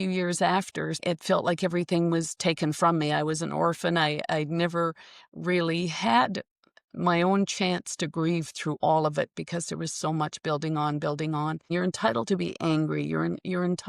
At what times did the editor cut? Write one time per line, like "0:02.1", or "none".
0:01.0
0:11.7